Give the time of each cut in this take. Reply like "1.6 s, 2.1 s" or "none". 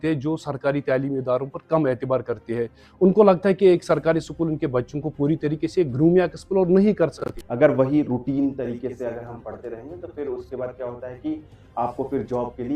7.3 s